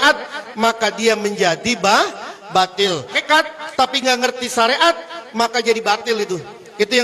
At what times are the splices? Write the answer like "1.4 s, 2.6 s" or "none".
3.2 s

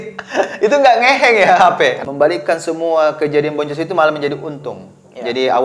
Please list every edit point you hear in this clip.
2.0 s

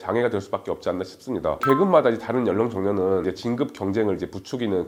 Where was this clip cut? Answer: 1.6 s, 3.2 s

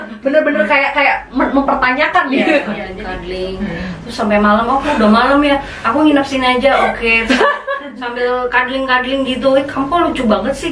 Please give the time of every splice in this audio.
2.8 s

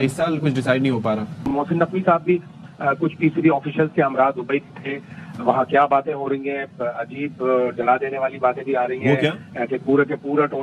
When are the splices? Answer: 1.4 s

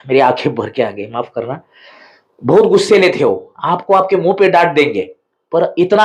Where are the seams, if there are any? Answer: none

